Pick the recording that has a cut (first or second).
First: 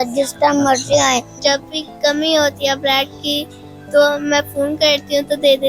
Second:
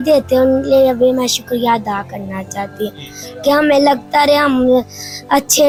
first